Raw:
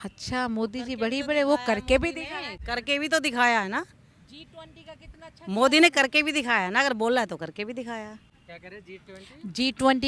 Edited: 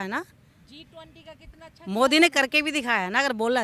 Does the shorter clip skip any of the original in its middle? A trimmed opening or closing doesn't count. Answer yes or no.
no